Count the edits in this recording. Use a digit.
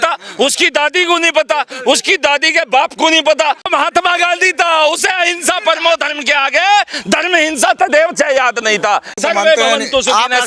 2